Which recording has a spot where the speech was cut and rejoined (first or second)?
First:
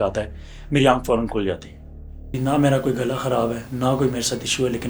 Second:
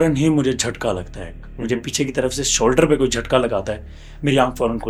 first